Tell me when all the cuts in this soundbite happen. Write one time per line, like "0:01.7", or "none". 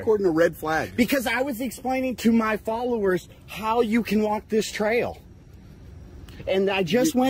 none